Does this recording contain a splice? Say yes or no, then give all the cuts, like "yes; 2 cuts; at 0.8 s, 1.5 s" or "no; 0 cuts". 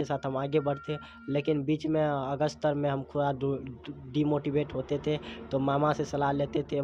no; 0 cuts